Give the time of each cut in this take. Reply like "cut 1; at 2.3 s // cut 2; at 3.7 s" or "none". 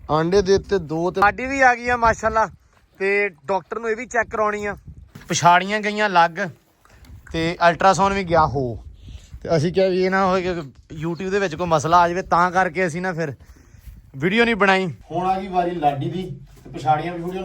cut 1; at 1.2 s // cut 2; at 5.2 s // cut 3; at 15.0 s